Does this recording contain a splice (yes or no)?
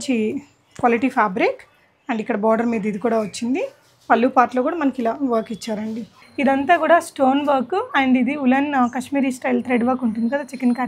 yes